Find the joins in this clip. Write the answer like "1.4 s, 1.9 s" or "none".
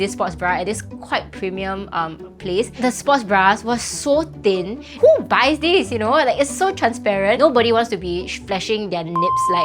2.8 s, 4.9 s, 7.4 s